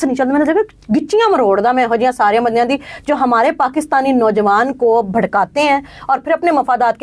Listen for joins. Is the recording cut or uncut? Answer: uncut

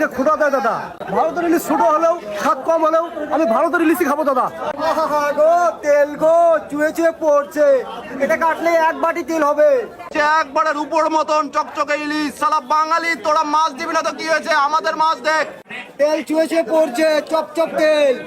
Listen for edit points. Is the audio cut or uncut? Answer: cut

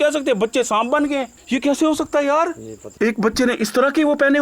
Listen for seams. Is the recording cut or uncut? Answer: cut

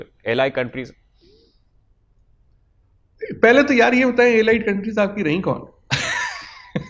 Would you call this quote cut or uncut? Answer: uncut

